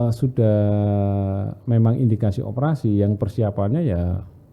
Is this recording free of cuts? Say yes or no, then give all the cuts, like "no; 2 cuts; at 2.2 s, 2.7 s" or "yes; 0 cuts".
yes; 0 cuts